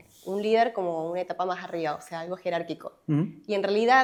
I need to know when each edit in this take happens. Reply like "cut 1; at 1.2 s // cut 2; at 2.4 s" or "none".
none